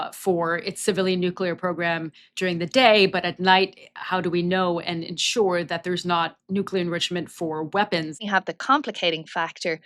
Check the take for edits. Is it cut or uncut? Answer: cut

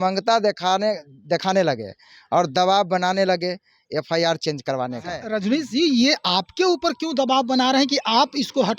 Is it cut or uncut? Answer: cut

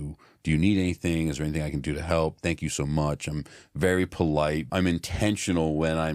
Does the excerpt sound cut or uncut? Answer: cut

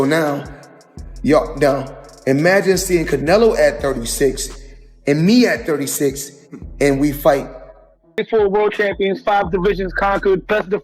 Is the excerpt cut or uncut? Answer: cut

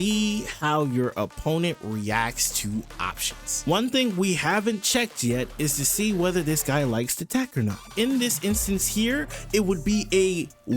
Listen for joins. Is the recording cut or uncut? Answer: cut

